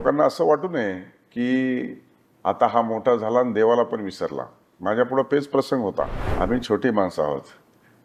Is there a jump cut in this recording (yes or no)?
yes